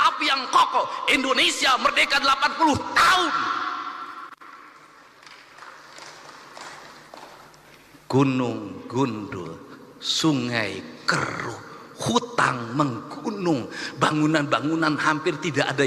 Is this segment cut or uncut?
uncut